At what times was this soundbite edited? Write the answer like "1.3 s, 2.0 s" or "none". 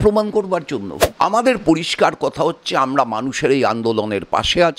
1.0 s